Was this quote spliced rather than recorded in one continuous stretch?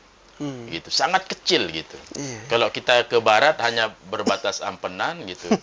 no; 0 cuts

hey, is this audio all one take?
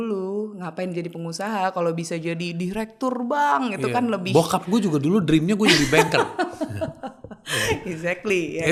yes; 0 cuts

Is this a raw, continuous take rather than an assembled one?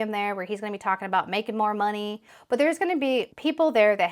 no; 1 cut; at 2.2 s

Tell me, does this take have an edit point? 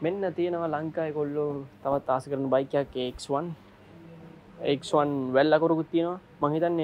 no; 0 cuts

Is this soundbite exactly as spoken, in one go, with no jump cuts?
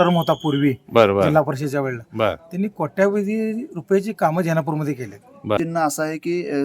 no; 1 cut; at 5.6 s

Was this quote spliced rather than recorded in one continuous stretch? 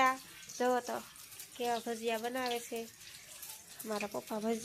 no; 0 cuts

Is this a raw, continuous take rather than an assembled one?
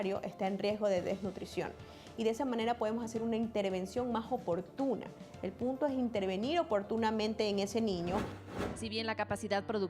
no; 1 cut; at 8.5 s

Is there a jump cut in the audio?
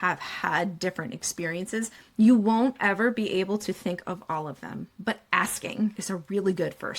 yes; 2 cuts; at 4.8 s, 6.0 s

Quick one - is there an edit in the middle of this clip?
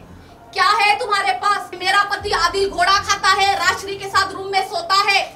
yes; 1 cut; at 1.7 s

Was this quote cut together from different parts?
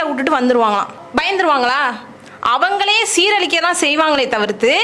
yes; 1 cut; at 1.0 s

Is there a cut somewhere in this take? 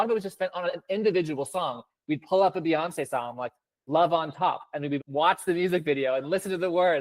yes; 1 cut; at 5.0 s

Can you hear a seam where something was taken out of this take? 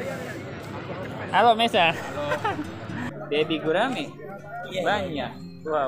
yes; 1 cut; at 3.1 s

